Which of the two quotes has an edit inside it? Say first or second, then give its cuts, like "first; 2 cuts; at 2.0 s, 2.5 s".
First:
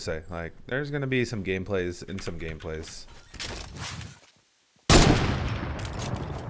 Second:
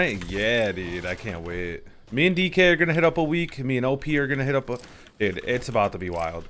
first; 1 cut; at 3.8 s